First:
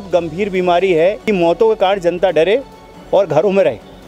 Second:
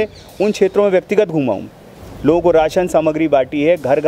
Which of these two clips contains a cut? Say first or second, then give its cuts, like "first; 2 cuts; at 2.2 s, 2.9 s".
first; 1 cut; at 1.2 s